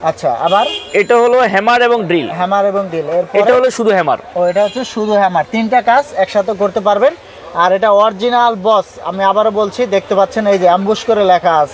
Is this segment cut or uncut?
uncut